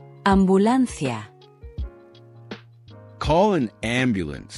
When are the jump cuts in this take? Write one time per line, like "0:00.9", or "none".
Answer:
0:01.4
0:03.1